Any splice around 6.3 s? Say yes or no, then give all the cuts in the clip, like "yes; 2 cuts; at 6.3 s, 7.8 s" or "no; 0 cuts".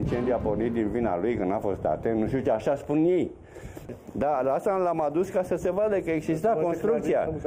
no; 1 cut; at 3.8 s